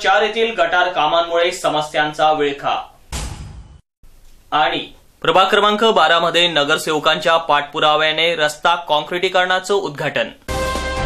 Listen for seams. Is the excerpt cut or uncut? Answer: uncut